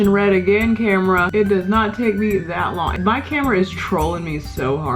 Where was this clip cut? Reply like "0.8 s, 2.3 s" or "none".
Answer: 1.3 s, 3.0 s